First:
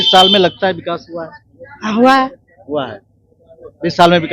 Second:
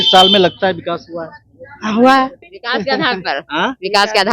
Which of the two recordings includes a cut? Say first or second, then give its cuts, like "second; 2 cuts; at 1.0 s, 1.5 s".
second; 1 cut; at 2.5 s